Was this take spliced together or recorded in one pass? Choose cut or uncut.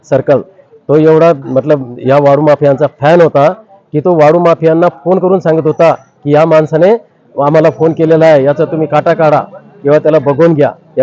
uncut